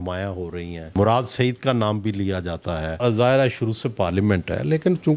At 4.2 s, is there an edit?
no; 2 cuts; at 0.9 s, 2.9 s

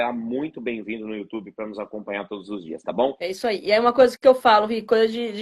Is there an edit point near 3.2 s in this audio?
yes; 1 cut; at 3.2 s

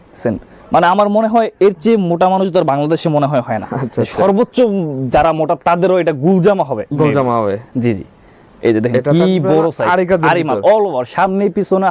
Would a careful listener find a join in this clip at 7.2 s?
no; 0 cuts

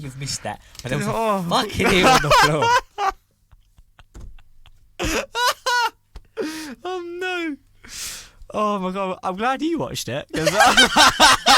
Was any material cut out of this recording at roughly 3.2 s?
no; 0 cuts

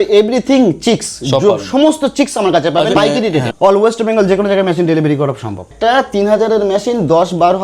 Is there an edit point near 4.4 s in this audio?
no; 2 cuts; at 3.0 s, 5.7 s

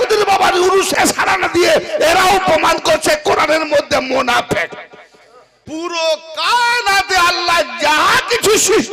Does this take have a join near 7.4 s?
no; 2 cuts; at 0.9 s, 5.5 s

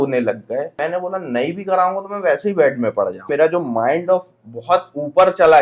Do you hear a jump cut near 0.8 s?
yes; 2 cuts; at 0.8 s, 3.3 s

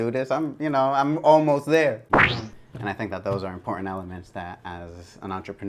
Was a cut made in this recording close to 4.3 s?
no; 1 cut; at 2.0 s

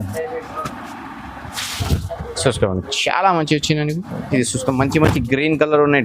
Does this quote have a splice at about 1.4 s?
no; 1 cut; at 4.2 s

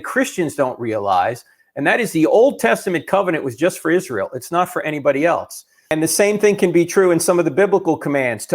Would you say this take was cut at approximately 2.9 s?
no; 1 cut; at 5.9 s

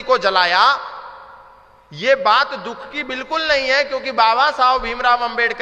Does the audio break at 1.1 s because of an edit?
no; 0 cuts

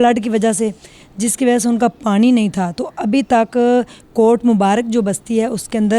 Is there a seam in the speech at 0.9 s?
no; 0 cuts

